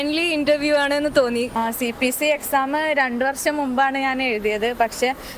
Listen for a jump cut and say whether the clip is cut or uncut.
cut